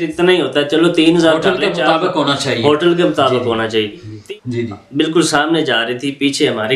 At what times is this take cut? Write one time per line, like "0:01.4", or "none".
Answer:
0:04.1